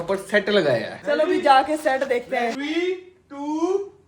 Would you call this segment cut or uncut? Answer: cut